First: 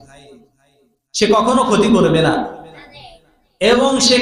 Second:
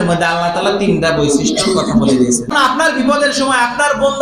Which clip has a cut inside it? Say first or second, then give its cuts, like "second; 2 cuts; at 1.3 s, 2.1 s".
second; 1 cut; at 2.5 s